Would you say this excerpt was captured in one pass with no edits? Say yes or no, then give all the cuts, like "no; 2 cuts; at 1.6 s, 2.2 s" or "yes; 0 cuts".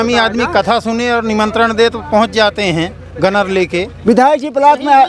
no; 1 cut; at 3.9 s